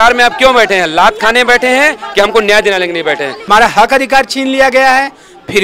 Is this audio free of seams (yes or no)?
no